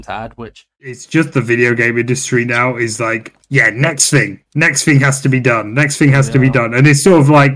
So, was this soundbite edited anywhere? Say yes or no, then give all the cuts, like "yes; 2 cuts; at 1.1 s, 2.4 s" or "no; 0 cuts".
yes; 1 cut; at 0.9 s